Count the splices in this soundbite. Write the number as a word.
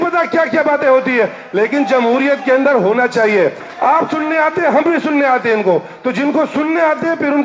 one